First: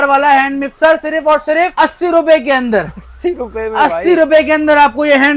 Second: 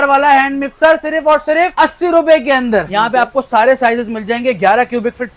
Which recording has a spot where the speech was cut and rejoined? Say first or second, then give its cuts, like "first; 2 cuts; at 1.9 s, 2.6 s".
second; 1 cut; at 2.9 s